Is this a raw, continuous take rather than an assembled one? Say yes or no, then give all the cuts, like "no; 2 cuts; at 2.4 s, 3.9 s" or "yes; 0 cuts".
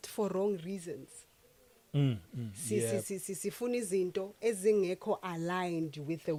yes; 0 cuts